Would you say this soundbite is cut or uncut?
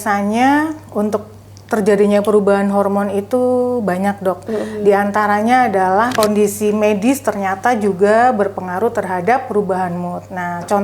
cut